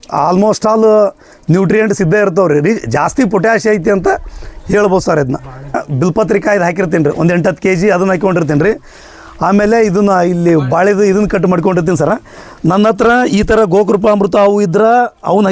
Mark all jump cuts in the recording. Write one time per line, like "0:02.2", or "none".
0:05.8